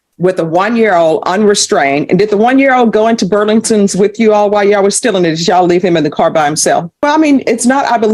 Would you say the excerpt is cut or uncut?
cut